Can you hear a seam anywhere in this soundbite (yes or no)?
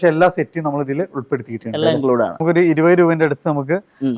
yes